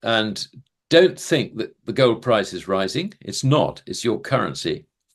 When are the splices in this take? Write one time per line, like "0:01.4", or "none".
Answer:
none